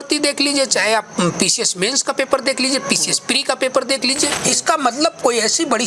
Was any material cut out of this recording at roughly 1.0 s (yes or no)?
no